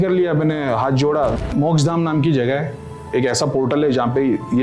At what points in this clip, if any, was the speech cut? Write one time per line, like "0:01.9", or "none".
0:01.4